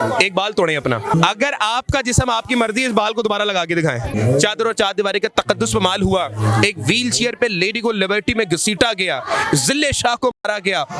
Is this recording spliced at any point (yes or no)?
yes